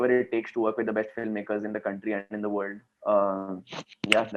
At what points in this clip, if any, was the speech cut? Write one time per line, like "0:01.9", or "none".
0:02.9